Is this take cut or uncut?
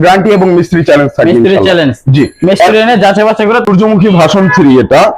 cut